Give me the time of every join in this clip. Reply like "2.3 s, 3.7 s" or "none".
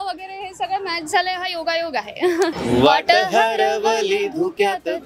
2.6 s